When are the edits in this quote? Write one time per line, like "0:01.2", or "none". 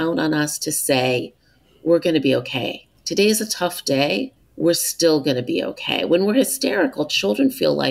0:04.4

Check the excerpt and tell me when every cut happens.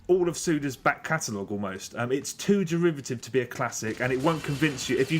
0:03.5

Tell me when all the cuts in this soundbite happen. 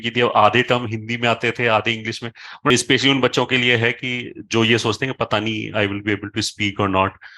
0:02.7

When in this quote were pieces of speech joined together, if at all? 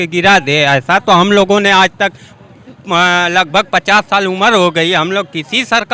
none

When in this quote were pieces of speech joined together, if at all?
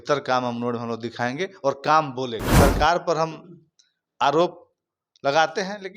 0:02.4

